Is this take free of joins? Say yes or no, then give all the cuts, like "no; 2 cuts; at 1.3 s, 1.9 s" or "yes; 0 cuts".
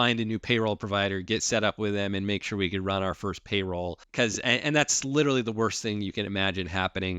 no; 1 cut; at 4.0 s